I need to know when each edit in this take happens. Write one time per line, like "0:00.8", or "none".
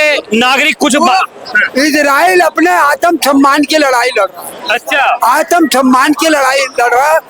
none